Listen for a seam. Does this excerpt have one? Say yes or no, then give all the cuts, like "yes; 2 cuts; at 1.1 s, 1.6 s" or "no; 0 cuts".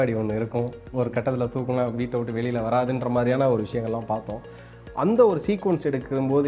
no; 0 cuts